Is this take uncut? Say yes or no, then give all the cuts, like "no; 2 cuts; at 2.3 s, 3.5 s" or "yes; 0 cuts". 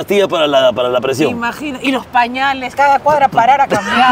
no; 1 cut; at 2.7 s